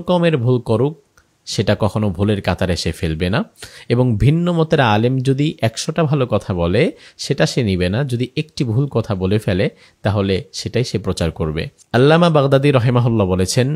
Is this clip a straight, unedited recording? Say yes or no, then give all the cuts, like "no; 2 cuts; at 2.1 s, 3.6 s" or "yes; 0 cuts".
no; 1 cut; at 11.7 s